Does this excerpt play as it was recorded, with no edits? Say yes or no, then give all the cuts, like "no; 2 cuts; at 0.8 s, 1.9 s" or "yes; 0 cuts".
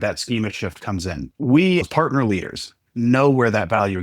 no; 2 cuts; at 1.3 s, 1.9 s